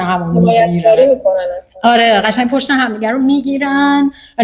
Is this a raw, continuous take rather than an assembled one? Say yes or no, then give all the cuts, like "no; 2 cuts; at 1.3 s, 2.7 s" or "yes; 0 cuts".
yes; 0 cuts